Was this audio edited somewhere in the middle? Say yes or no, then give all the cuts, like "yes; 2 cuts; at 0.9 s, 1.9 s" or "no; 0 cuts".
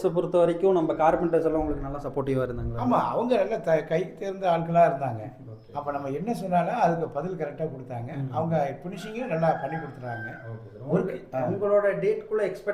no; 0 cuts